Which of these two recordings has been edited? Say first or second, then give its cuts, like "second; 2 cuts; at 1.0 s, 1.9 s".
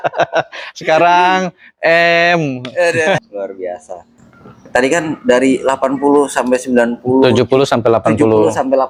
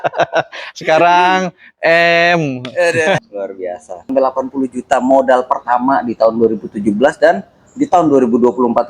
second; 1 cut; at 4.1 s